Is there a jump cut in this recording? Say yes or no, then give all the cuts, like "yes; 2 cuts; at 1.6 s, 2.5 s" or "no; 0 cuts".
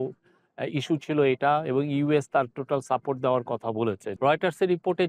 yes; 1 cut; at 4.1 s